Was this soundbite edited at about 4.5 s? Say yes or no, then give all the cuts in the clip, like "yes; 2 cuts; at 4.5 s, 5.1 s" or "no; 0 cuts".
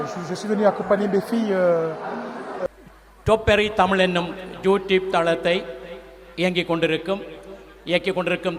no; 1 cut; at 2.7 s